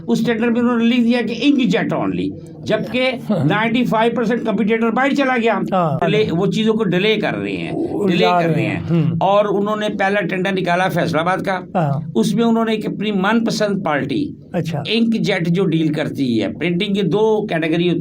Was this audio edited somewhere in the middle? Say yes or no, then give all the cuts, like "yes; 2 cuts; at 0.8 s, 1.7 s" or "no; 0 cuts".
yes; 1 cut; at 6.0 s